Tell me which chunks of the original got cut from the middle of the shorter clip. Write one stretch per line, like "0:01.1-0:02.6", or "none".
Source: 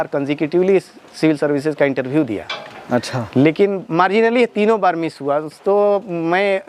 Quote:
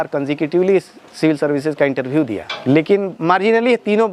0:02.5-0:03.2